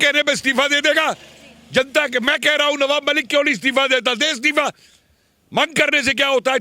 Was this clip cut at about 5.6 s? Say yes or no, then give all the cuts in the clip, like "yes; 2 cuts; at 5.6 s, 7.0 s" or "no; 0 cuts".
no; 0 cuts